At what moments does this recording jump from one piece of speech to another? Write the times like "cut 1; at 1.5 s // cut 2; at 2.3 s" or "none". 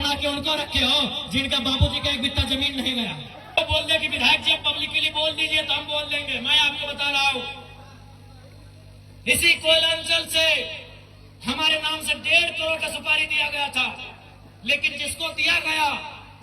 cut 1; at 3.6 s